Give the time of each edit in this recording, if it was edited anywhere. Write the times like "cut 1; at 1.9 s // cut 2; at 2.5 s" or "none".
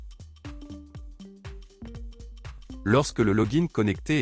cut 1; at 2.8 s